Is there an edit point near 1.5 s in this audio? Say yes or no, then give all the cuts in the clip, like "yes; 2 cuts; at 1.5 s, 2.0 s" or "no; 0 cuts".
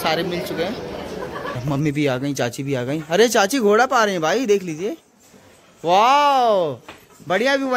yes; 1 cut; at 1.5 s